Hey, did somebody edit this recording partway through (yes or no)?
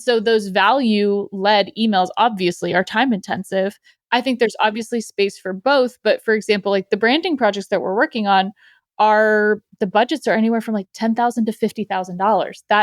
no